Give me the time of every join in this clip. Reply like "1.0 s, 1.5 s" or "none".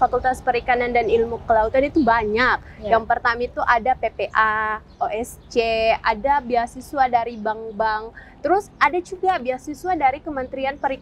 none

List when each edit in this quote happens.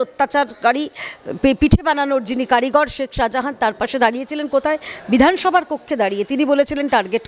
none

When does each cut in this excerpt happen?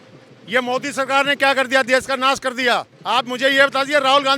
2.9 s

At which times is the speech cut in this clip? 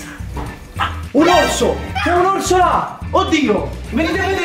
none

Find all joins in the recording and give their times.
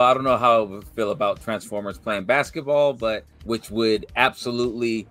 3.3 s

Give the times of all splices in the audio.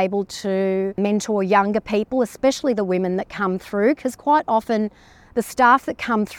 1.0 s

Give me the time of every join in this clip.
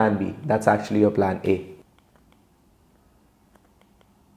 none

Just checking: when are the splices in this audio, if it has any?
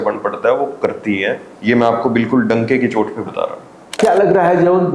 4.0 s

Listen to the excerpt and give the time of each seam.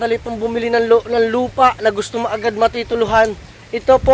none

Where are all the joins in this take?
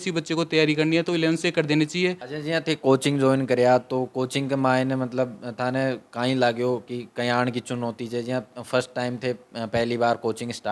none

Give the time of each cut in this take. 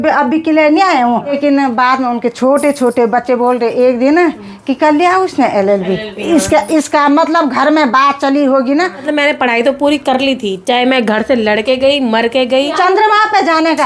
1.4 s, 9.0 s, 12.7 s

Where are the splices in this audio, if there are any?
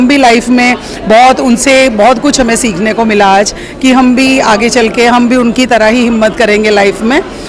none

